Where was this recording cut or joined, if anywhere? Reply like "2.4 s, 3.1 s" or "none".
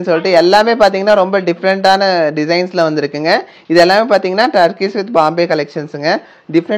none